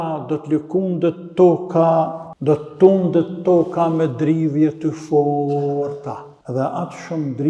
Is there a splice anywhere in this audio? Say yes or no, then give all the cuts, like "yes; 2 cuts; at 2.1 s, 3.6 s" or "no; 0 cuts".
yes; 2 cuts; at 2.2 s, 6.3 s